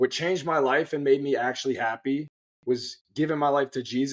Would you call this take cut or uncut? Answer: uncut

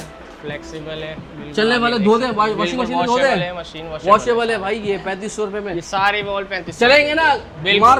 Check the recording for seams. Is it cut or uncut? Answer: uncut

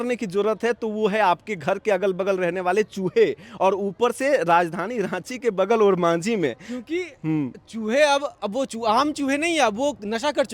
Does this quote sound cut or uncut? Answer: uncut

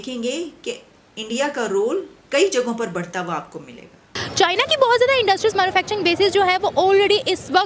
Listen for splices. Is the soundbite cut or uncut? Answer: cut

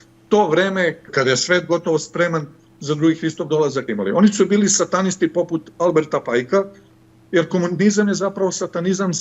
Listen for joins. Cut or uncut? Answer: cut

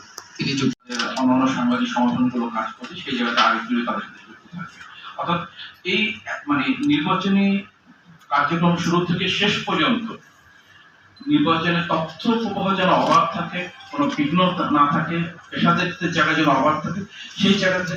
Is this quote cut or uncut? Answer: uncut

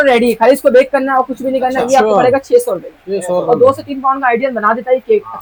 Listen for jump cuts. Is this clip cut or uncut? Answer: uncut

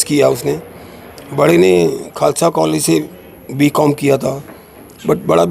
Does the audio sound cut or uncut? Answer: uncut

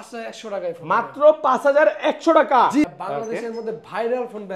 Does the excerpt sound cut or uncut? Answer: cut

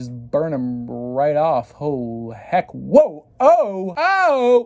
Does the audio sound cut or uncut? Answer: uncut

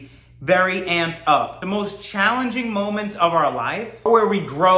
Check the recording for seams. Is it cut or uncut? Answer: cut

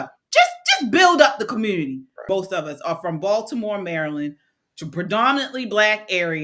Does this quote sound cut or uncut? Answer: cut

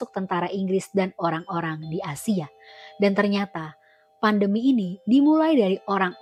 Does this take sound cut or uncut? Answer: uncut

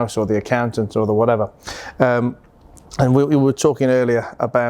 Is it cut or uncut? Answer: uncut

